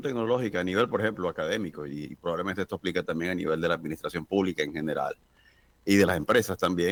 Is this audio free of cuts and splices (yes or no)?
yes